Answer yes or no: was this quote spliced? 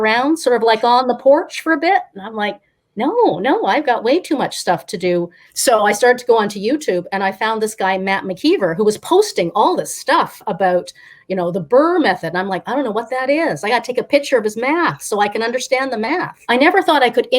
yes